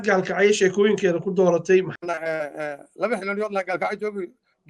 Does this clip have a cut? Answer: yes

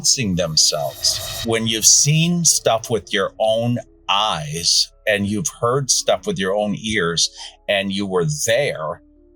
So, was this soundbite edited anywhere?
yes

